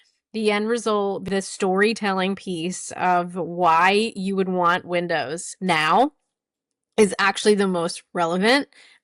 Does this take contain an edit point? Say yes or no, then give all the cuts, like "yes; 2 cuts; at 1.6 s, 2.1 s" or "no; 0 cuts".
yes; 1 cut; at 1.2 s